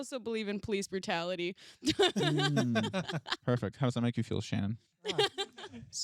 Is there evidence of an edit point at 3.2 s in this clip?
yes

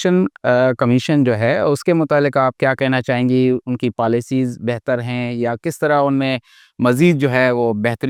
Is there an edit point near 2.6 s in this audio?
no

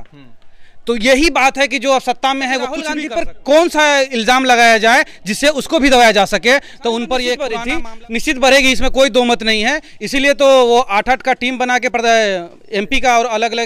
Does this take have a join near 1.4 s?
no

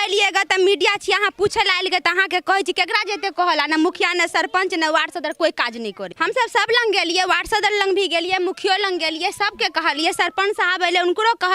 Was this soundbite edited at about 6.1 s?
yes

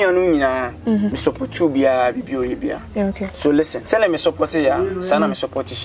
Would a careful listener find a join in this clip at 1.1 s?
yes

